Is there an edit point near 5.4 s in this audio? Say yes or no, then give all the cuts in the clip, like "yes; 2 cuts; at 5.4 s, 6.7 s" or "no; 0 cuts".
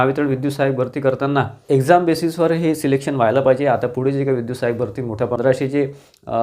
yes; 2 cuts; at 1.6 s, 5.4 s